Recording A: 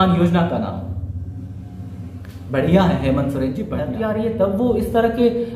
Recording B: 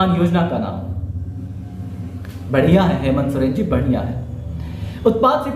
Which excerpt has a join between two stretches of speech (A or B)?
A